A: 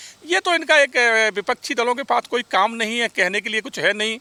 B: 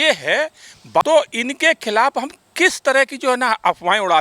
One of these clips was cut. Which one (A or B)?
B